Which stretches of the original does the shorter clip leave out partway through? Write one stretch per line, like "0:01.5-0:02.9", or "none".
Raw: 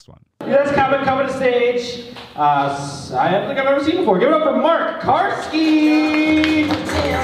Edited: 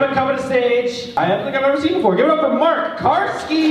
0:02.0-0:03.1